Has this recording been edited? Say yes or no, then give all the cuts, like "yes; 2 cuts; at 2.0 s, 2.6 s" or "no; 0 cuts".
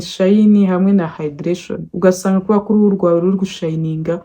no; 0 cuts